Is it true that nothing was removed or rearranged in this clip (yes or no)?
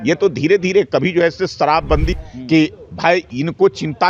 no